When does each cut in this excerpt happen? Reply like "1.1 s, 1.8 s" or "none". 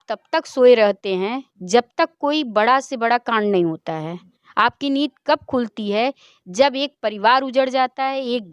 none